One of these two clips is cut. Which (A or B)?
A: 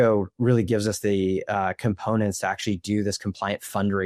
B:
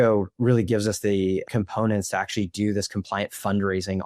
B